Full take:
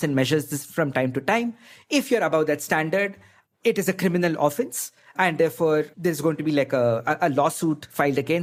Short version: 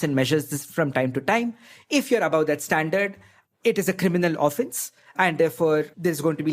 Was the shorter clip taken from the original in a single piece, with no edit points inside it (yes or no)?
yes